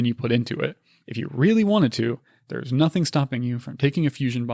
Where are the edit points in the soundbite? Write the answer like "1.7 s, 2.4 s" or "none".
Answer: 0.9 s